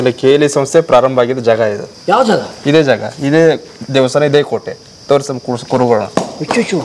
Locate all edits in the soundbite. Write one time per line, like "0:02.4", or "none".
0:01.9